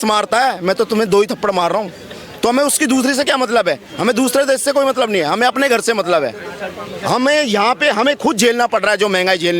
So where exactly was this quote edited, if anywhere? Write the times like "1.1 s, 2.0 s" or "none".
none